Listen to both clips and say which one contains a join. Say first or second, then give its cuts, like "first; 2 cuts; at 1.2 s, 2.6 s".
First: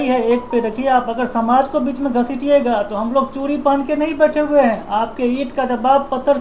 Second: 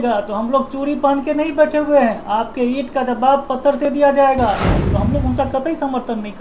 second; 1 cut; at 4.8 s